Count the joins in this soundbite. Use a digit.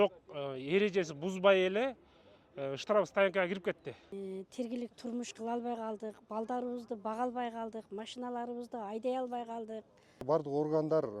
2